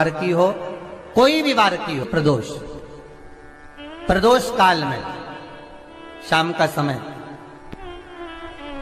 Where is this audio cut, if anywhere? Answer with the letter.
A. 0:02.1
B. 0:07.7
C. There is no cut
A